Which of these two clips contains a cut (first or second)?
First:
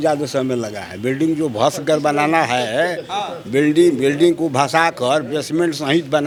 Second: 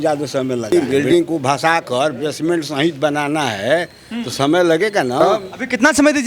second